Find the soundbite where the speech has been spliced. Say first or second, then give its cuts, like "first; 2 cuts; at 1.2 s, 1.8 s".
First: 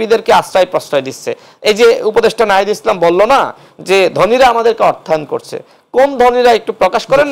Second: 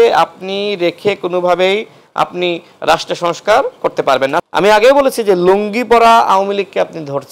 second; 1 cut; at 4.5 s